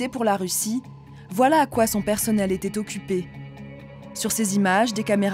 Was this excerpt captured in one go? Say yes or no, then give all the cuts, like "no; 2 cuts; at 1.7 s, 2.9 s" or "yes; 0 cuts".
yes; 0 cuts